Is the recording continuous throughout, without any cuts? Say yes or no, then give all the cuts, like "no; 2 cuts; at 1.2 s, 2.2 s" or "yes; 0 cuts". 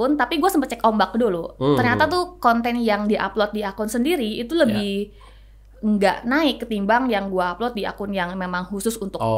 yes; 0 cuts